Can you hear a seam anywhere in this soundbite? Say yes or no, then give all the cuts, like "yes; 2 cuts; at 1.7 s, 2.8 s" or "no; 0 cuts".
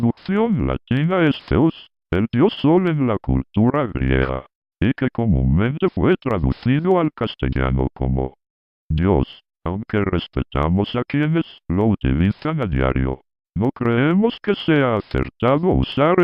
yes; 1 cut; at 2.4 s